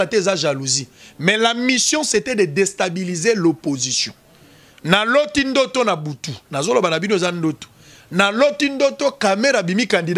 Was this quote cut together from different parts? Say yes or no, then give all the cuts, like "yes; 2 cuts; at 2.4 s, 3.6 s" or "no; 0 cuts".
no; 0 cuts